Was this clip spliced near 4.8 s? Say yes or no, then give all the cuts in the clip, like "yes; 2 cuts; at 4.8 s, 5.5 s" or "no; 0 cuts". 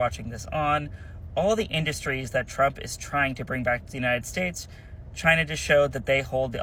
no; 0 cuts